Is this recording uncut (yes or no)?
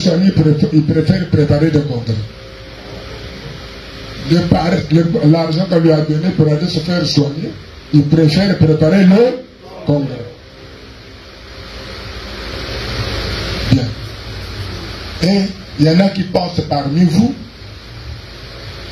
yes